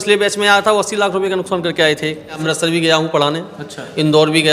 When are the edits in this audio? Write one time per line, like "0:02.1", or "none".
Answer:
0:02.4